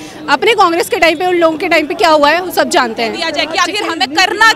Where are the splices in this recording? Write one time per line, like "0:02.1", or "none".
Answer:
0:03.3